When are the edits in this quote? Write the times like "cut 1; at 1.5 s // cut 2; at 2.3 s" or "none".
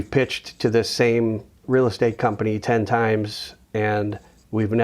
cut 1; at 1.5 s